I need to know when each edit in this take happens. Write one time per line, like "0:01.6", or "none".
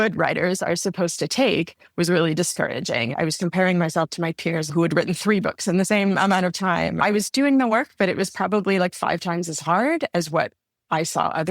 0:03.1
0:04.7
0:07.0